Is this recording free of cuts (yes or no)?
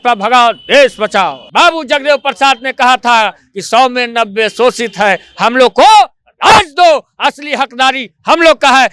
no